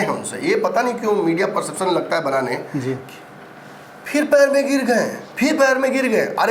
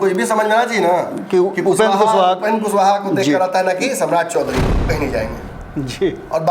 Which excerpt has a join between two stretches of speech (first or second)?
second